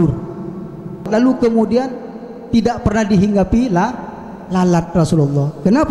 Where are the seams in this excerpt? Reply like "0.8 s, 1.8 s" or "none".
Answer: 1.1 s